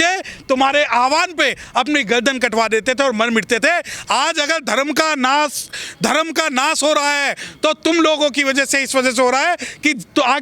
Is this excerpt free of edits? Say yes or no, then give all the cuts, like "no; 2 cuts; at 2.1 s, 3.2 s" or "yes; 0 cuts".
yes; 0 cuts